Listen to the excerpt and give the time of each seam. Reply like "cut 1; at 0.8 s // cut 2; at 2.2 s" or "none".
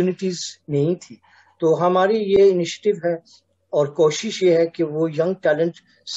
none